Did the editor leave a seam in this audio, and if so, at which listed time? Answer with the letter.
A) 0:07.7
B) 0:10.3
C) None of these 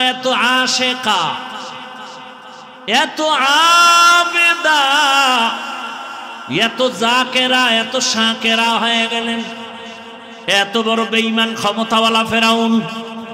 B